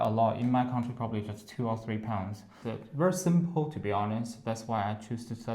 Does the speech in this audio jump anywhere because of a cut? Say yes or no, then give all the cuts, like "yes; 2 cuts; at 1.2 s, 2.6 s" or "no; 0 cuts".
yes; 1 cut; at 2.6 s